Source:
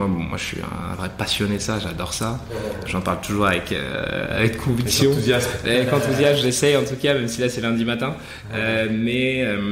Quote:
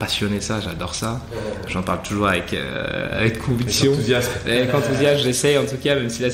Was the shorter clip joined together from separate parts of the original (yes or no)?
no